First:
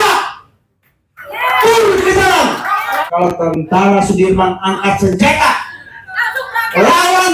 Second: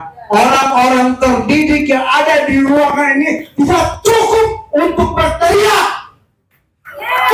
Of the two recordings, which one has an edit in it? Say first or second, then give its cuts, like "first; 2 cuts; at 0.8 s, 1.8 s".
first; 1 cut; at 3.0 s